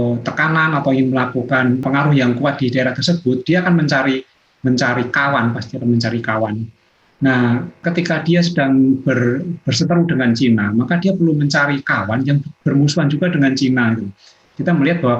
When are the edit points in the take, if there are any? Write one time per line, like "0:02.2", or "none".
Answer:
0:01.8
0:07.8